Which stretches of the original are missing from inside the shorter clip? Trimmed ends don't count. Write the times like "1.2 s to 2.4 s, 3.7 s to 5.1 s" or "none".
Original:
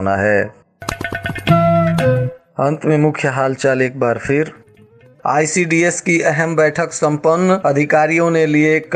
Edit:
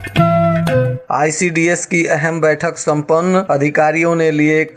2.3 s to 5.1 s